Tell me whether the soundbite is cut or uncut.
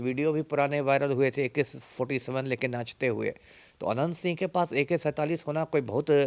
uncut